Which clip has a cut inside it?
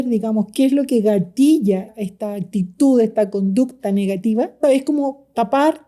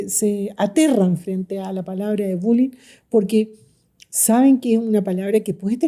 first; 2 cuts; at 1.9 s, 4.6 s

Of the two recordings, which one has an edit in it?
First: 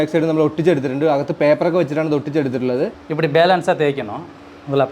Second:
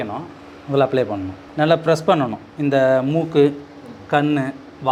first; 1 cut; at 3.0 s

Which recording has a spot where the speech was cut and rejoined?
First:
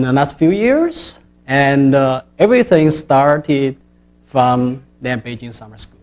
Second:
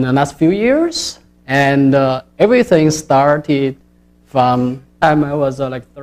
first; 1 cut; at 5.0 s

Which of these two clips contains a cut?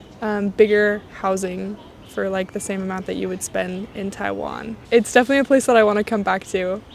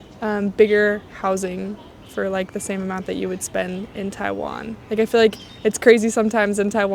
first; 1 cut; at 4.8 s

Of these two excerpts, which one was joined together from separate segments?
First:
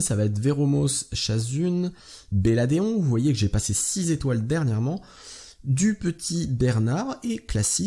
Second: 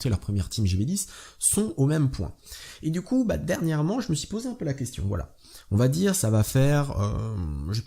second; 1 cut; at 4.0 s

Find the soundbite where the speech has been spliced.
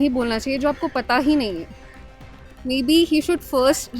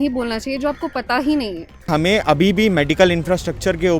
second; 1 cut; at 1.8 s

